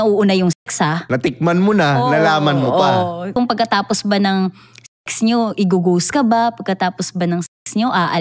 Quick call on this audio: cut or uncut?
cut